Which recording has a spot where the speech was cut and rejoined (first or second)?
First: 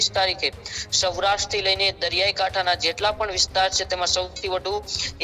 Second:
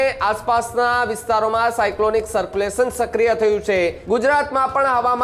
second